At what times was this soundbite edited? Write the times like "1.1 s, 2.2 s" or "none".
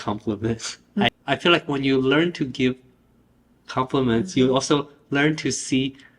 1.1 s